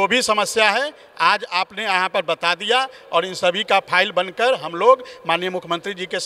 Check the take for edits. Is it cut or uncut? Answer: uncut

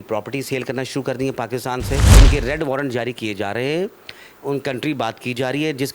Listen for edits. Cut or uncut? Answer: cut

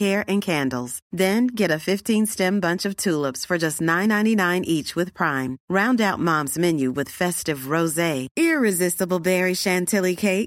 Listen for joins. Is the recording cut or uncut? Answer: uncut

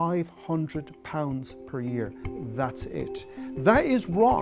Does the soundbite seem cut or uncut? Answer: uncut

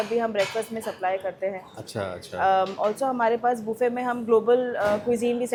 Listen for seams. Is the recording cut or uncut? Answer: uncut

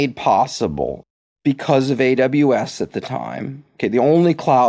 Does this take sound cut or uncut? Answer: uncut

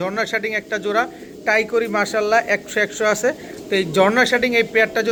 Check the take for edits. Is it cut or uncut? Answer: uncut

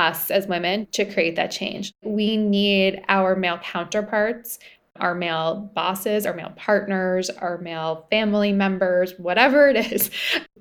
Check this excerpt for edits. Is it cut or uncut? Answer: cut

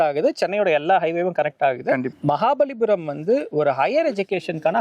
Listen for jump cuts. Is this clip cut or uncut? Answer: cut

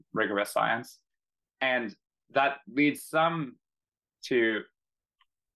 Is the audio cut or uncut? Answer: uncut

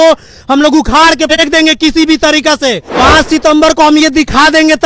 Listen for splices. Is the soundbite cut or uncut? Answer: cut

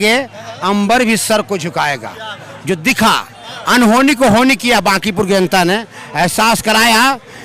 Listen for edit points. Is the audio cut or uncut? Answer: uncut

